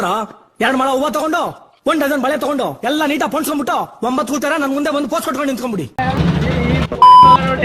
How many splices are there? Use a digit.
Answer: 1